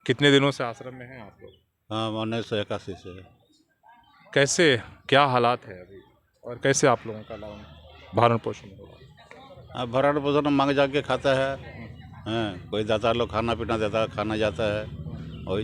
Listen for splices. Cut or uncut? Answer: uncut